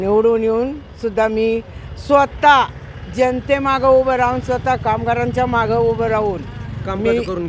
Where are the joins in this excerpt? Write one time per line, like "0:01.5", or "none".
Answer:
none